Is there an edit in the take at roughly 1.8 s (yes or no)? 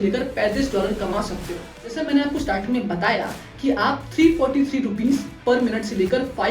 yes